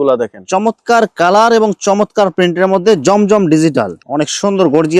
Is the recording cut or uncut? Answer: cut